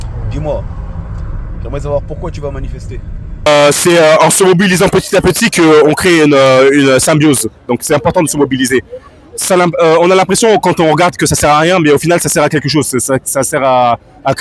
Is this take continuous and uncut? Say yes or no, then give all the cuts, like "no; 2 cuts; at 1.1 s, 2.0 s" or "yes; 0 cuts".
no; 1 cut; at 3.5 s